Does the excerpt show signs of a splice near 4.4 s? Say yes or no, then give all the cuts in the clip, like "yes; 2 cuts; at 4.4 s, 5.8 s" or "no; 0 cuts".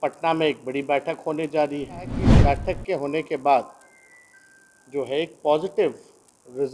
no; 1 cut; at 2.4 s